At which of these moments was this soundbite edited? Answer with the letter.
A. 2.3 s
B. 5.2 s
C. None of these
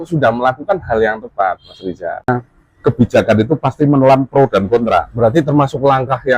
A